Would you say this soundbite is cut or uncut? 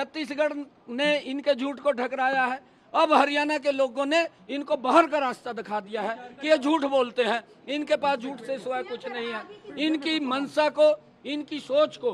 uncut